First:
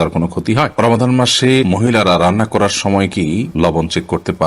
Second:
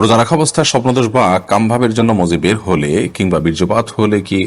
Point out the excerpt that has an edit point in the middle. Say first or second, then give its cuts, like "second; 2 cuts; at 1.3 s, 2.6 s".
first; 3 cuts; at 0.7 s, 1.6 s, 3.5 s